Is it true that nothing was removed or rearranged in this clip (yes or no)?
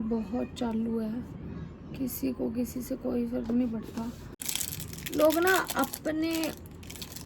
no